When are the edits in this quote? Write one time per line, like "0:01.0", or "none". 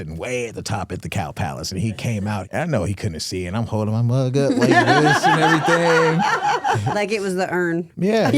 0:02.4
0:06.9